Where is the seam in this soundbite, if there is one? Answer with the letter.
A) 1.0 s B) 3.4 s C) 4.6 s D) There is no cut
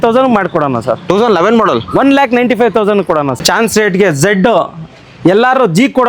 B